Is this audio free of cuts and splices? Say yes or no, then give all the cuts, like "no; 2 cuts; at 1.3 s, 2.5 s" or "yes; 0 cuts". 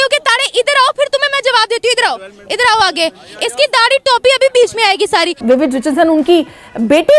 no; 1 cut; at 5.4 s